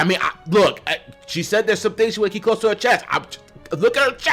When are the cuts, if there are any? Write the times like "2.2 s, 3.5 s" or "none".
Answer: none